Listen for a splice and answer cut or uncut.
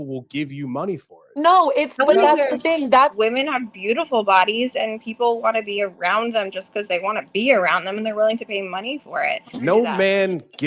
cut